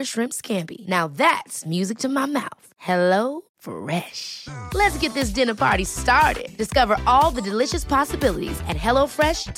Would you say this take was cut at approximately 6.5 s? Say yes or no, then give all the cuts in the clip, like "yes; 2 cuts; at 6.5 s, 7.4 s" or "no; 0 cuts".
no; 0 cuts